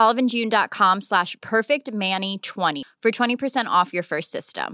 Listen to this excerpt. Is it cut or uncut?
uncut